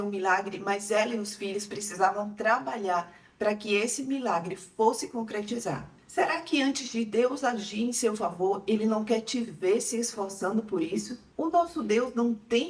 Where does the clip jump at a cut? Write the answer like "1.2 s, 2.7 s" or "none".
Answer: 6.0 s, 11.2 s